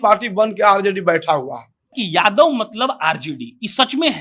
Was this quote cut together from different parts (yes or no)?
yes